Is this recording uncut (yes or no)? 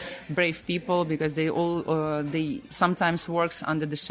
no